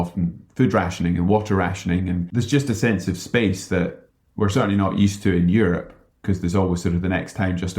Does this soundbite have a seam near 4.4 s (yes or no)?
no